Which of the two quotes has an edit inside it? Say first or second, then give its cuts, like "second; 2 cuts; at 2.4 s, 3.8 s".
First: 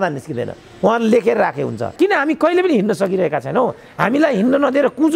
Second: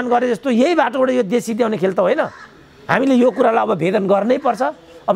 first; 1 cut; at 1.8 s